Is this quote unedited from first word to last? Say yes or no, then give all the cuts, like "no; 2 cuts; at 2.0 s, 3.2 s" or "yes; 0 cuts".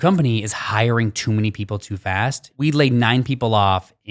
no; 1 cut; at 2.4 s